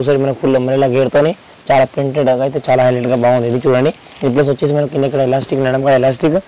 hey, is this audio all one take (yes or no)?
yes